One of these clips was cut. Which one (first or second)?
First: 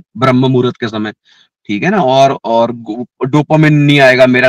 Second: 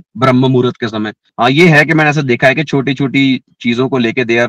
second